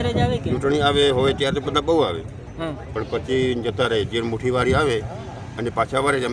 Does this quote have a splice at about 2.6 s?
no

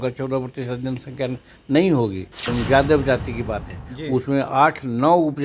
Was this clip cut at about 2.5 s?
yes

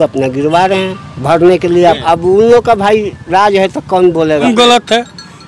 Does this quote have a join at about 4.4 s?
yes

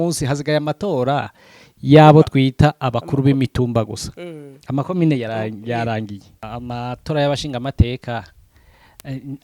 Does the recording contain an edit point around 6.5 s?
yes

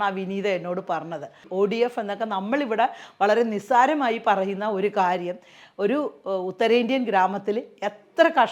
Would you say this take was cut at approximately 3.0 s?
no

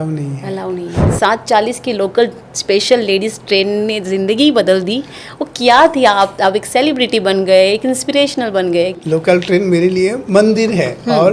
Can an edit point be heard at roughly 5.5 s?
no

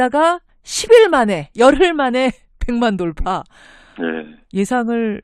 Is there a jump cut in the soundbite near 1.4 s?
yes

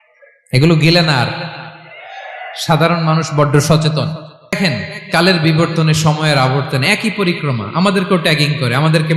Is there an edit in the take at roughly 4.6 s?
yes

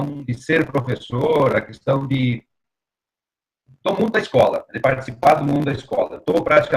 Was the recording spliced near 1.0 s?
yes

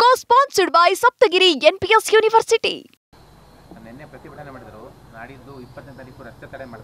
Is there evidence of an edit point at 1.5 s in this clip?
no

